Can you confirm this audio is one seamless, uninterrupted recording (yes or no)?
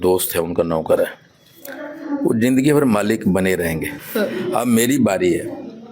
no